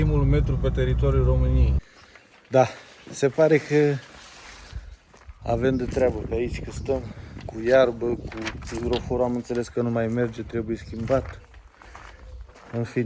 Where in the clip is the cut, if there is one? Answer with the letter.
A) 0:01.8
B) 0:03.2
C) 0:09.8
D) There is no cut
A